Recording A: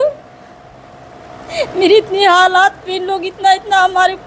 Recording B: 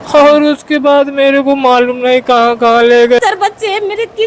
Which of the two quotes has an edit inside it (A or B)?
B